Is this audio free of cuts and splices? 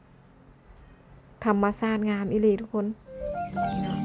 no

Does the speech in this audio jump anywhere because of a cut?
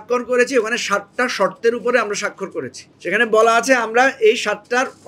no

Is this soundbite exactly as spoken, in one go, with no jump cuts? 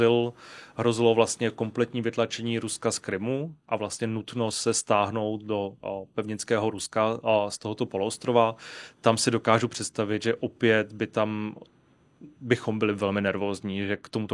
yes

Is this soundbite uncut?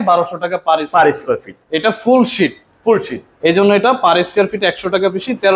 yes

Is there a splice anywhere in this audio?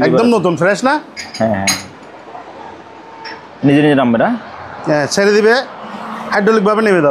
no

